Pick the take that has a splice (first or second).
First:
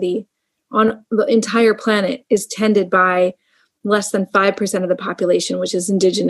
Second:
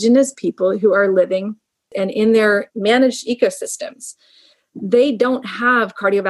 second